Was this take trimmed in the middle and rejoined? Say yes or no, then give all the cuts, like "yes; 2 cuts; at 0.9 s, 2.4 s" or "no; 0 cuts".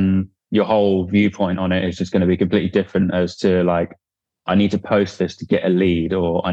no; 0 cuts